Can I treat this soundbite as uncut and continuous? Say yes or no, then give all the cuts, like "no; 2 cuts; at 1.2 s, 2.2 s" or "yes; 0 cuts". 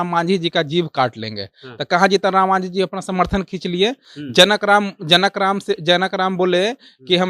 yes; 0 cuts